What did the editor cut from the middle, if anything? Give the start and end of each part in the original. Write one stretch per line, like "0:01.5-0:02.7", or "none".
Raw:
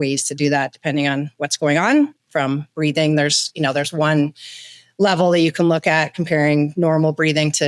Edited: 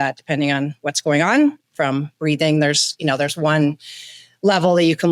none